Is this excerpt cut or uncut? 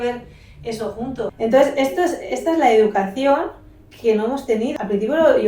cut